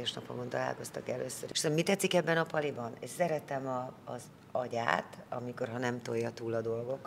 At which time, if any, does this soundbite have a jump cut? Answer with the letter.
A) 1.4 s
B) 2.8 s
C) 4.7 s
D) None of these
A